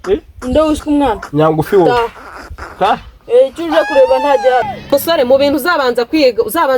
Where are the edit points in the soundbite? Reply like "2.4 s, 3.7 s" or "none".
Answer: 4.7 s

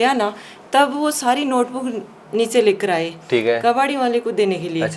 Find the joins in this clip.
none

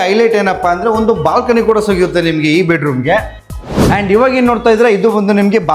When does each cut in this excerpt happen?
3.7 s

